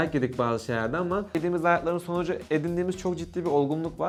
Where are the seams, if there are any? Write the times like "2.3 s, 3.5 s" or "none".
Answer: none